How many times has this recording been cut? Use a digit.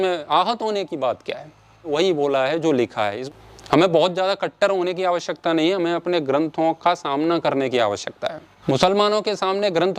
3